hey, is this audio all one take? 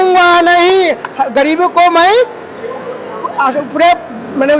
yes; 0 cuts

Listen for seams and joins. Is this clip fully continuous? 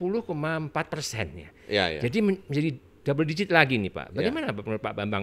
yes; 0 cuts

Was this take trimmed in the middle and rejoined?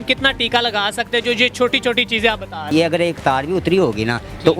yes; 1 cut; at 2.7 s

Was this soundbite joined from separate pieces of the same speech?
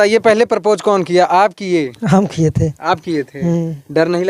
no; 0 cuts

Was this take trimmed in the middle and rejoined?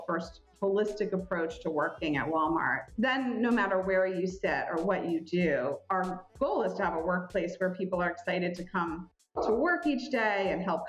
no; 0 cuts

